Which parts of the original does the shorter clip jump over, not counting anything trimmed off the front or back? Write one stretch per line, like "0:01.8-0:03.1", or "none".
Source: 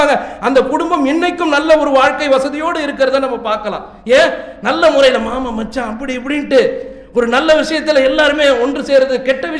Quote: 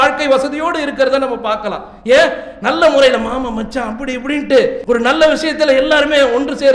0:06.8-0:07.1